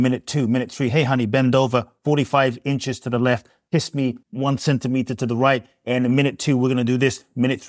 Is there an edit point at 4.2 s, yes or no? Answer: yes